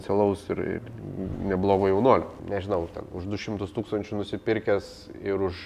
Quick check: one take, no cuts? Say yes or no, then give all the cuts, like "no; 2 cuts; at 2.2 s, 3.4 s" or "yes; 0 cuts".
no; 1 cut; at 2.4 s